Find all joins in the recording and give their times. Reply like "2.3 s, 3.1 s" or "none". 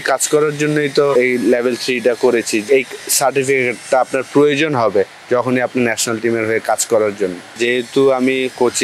1.1 s, 2.6 s, 7.5 s